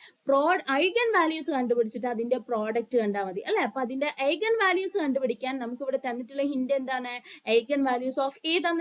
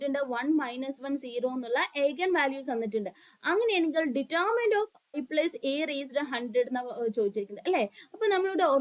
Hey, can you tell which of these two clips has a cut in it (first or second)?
second